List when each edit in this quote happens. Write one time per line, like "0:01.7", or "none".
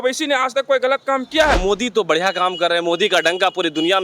0:01.6